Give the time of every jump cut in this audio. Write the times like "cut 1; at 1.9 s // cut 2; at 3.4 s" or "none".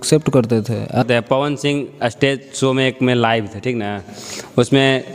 cut 1; at 1.0 s